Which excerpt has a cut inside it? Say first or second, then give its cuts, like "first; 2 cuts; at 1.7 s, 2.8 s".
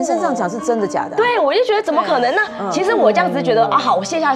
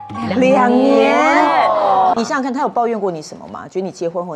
second; 1 cut; at 2.1 s